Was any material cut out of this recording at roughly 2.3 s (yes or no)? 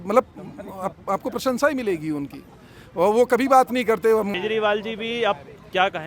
no